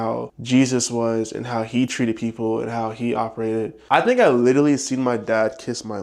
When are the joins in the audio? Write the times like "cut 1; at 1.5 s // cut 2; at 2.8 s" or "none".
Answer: cut 1; at 3.8 s